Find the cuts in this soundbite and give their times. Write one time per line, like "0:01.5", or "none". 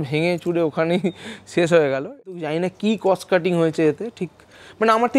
0:02.3